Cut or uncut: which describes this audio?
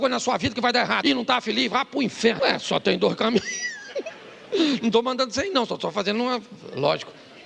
cut